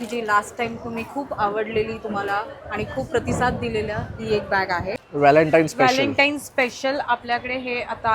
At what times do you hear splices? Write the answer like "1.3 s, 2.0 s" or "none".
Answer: 4.9 s